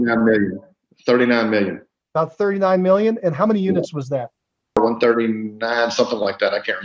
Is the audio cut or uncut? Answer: cut